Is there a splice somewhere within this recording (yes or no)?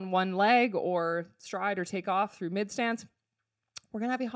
no